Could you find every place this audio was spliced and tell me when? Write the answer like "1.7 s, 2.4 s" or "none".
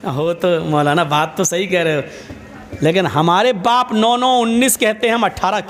none